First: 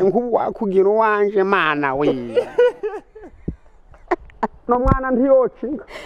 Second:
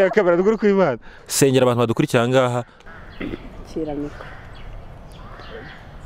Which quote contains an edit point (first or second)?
second